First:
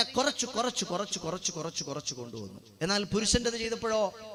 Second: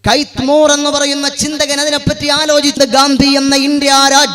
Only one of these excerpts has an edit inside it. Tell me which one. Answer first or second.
second